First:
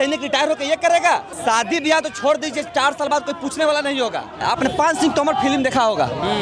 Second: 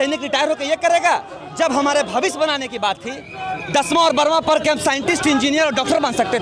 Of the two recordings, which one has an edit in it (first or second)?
first